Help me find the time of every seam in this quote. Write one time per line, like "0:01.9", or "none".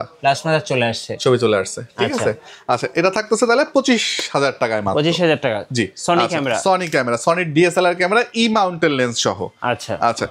none